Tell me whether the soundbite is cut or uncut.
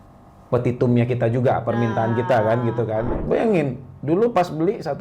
cut